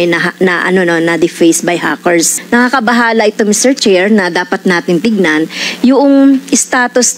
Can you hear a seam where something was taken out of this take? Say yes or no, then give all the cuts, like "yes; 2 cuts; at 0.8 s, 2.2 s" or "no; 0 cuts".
yes; 1 cut; at 2.4 s